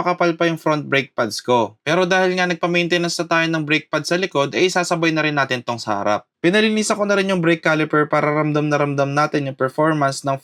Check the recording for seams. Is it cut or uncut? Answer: uncut